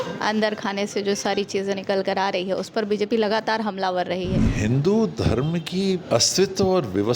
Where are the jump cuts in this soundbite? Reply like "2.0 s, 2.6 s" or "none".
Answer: 4.5 s, 6.0 s